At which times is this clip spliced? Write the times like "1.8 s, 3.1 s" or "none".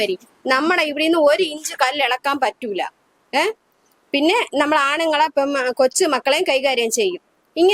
none